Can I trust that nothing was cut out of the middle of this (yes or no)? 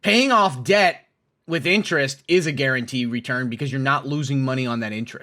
yes